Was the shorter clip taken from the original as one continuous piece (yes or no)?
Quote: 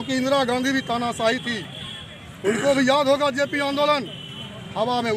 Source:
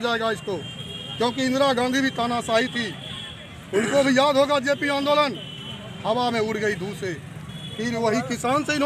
yes